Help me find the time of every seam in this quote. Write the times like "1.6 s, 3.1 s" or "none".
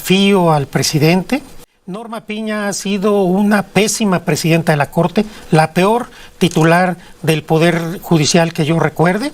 2.0 s